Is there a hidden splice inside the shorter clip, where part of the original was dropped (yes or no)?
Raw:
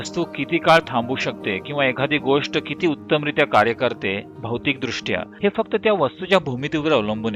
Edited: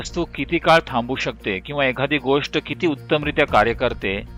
no